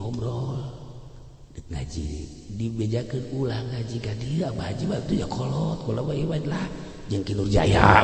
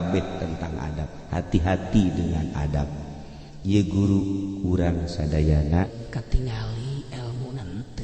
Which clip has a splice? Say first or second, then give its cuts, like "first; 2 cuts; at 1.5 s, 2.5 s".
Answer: second; 1 cut; at 5.9 s